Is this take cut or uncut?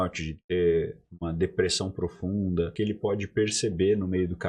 cut